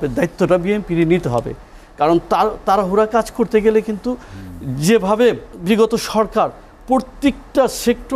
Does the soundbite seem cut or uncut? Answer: cut